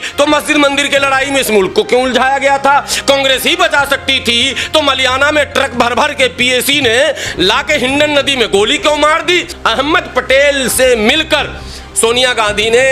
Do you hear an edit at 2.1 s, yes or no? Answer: no